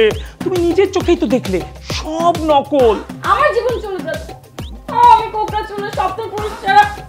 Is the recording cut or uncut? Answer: cut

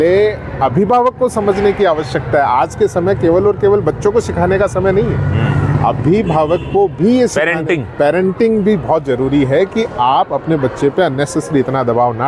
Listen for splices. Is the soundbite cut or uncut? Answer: uncut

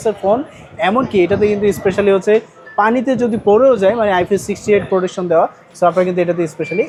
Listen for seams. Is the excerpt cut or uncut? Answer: uncut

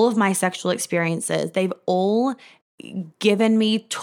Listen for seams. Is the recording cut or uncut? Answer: uncut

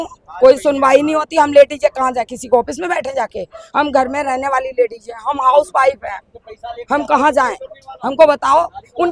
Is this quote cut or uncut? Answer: uncut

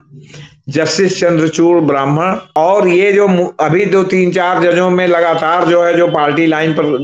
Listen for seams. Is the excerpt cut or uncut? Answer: cut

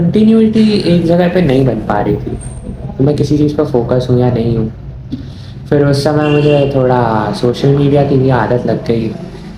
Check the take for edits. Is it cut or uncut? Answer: uncut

